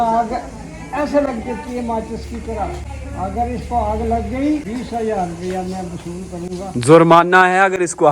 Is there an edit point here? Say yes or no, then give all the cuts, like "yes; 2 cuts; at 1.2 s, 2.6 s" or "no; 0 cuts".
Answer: yes; 1 cut; at 4.7 s